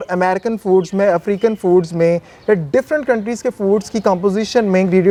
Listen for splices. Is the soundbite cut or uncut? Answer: uncut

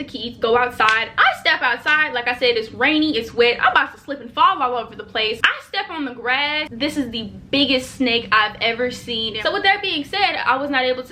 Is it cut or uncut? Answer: cut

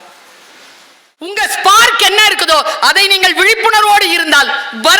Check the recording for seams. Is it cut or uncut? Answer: cut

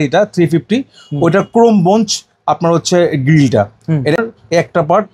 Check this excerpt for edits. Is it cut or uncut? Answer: cut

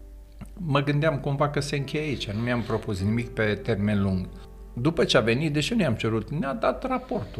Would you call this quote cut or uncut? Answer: cut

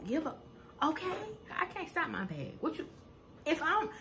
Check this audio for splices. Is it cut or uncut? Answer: cut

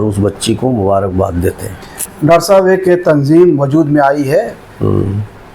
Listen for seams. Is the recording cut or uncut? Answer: cut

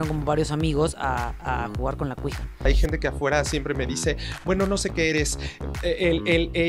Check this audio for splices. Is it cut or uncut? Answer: cut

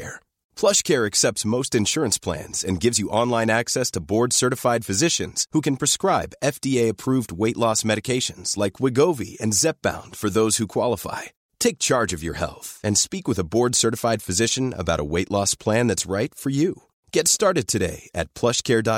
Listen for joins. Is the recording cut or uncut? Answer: uncut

